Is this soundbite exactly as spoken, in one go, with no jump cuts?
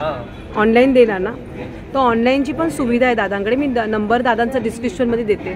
yes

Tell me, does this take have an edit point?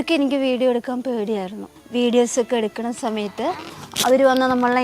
yes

